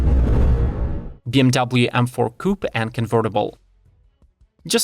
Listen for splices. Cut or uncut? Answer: cut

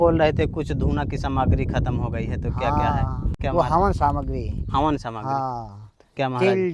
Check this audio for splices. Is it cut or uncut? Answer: uncut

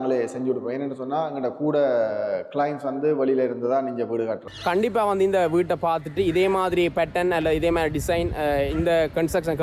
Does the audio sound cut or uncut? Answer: cut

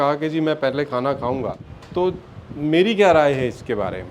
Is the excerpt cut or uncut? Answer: cut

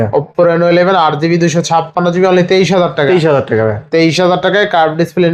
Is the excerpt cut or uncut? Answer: uncut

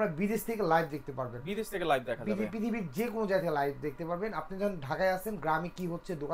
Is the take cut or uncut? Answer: uncut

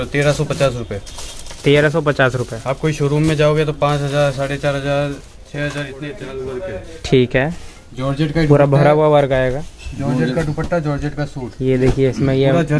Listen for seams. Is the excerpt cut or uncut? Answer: cut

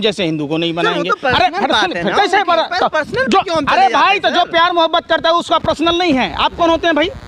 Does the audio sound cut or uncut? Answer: uncut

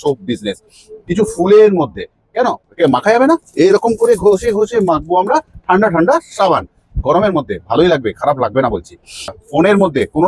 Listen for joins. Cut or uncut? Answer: cut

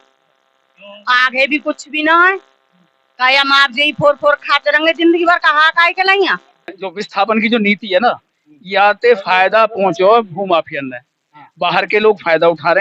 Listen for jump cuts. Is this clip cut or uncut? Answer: cut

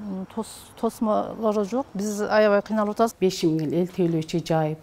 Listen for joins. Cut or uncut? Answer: cut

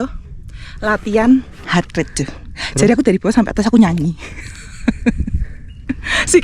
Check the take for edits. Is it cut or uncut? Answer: uncut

